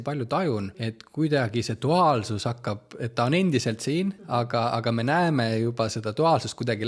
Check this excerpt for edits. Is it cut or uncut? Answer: cut